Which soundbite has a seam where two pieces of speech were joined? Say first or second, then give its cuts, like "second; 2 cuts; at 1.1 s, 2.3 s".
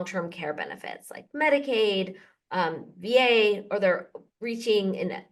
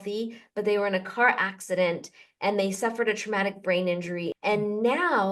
second; 1 cut; at 4.3 s